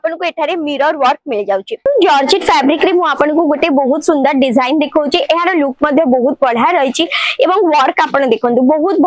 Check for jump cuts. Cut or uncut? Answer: cut